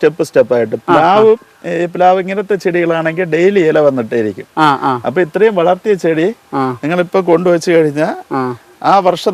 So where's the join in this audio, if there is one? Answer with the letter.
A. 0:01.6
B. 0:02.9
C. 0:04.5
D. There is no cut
D